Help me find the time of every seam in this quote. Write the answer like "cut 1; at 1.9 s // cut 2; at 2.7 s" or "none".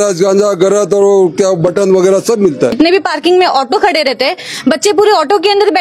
cut 1; at 2.7 s